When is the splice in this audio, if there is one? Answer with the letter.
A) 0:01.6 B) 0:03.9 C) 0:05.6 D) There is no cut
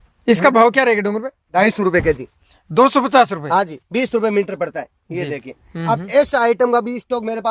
A